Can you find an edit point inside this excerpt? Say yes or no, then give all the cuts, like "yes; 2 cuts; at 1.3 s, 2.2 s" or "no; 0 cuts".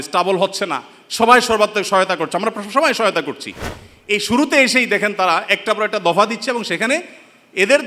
no; 0 cuts